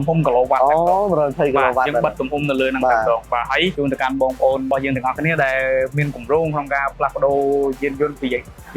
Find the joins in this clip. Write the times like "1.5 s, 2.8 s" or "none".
3.7 s, 4.7 s